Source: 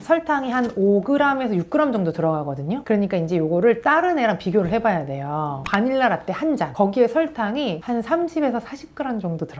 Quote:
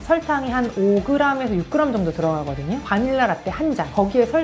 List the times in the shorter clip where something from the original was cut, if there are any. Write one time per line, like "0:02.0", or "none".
0:02.8

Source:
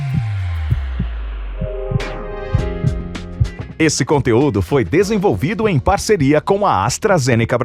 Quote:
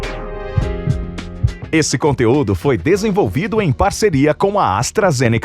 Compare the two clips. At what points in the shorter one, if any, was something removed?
0:01.6

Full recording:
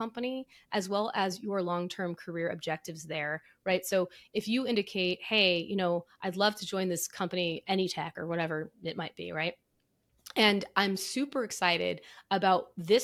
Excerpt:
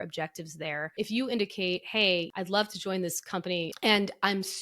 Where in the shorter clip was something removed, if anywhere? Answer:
0:00.9
0:02.3
0:03.7

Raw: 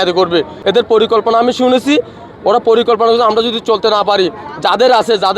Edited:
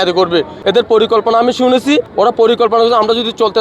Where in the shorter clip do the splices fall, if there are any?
0:02.1

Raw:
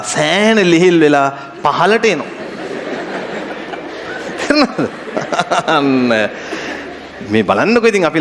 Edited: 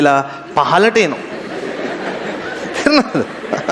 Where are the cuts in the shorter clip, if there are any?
0:02.4

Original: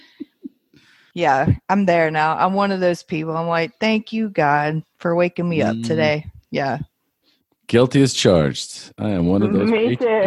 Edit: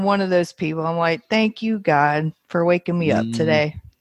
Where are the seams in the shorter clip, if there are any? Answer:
none

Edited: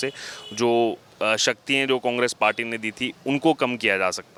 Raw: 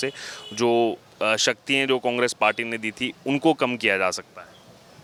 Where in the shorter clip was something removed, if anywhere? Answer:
none

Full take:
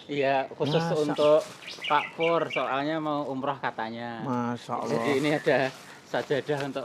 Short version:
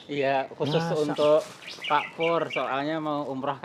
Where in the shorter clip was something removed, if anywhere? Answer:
none

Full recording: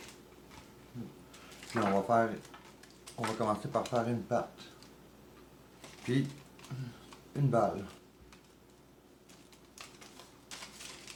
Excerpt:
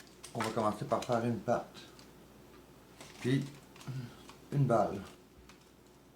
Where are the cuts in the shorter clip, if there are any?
none

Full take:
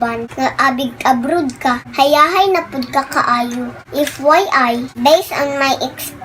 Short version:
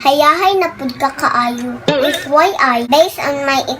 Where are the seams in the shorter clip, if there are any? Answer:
0:02.9

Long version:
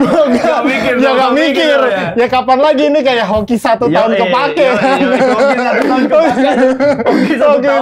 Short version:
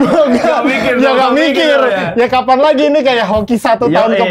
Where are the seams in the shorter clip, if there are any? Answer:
none

